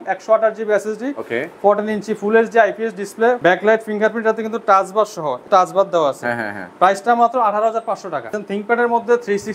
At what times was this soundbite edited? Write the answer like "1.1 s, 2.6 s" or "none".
3.4 s, 5.4 s, 8.4 s

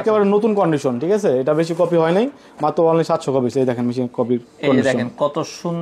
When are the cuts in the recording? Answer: none

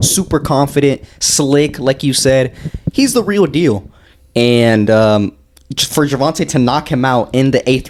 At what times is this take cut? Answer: none

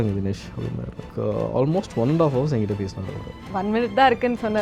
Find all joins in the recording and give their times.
1.0 s

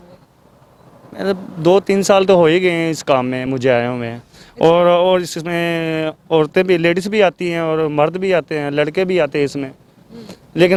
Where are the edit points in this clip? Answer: none

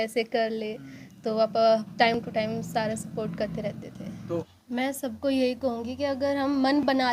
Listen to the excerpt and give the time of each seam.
4.5 s

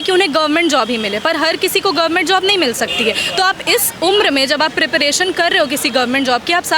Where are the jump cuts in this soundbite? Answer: none

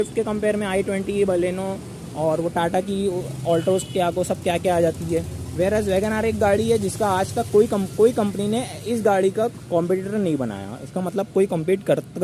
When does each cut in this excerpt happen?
none

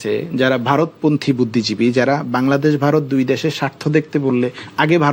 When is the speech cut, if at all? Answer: none

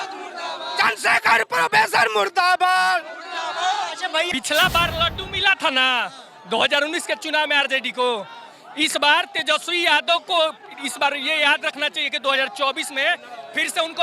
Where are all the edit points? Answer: 4.3 s

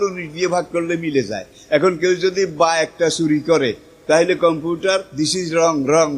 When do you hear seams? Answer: 5.1 s

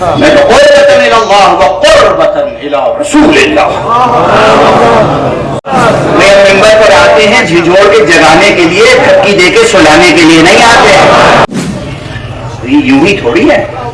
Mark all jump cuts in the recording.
5.7 s, 11.5 s

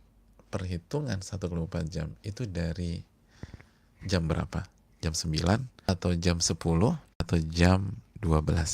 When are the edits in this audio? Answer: 5.9 s, 7.3 s

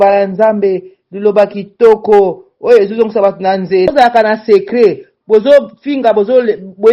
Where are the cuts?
3.9 s

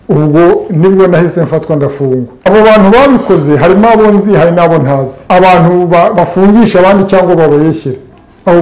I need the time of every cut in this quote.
2.5 s, 5.1 s

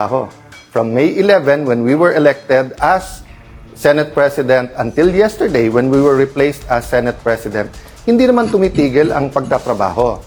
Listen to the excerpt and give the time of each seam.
none

